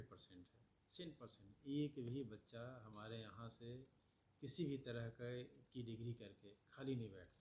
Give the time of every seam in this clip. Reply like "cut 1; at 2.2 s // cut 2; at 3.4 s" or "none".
none

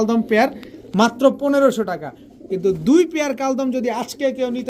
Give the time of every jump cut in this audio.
none

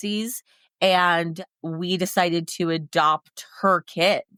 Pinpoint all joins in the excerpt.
none

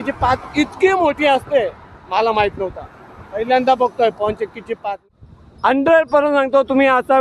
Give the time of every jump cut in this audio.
cut 1; at 5.1 s

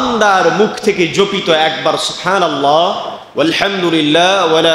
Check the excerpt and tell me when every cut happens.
none

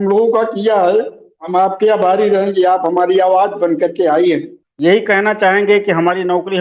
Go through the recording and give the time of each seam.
cut 1; at 4.6 s

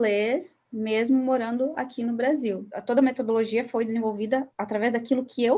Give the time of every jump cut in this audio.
cut 1; at 2.7 s

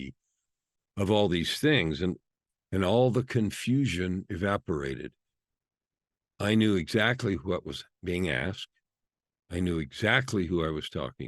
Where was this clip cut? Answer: cut 1; at 2.2 s

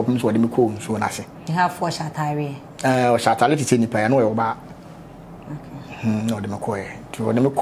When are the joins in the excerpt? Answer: none

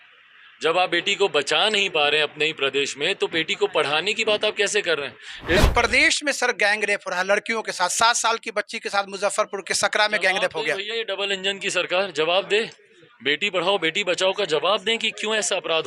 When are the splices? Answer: cut 1; at 5.6 s

